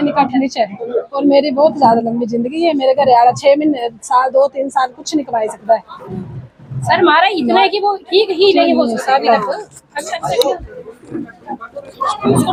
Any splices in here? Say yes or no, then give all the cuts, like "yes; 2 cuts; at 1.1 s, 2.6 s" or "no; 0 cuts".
no; 0 cuts